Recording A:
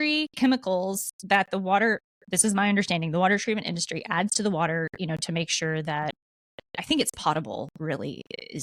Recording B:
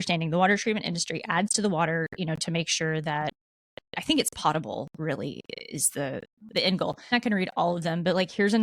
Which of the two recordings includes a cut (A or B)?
B